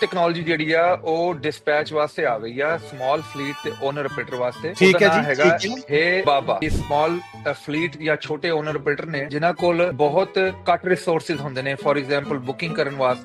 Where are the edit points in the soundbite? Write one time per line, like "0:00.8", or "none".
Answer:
0:04.7
0:06.6
0:09.3
0:09.9